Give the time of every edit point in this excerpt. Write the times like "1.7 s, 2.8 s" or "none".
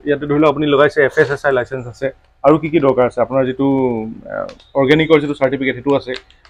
none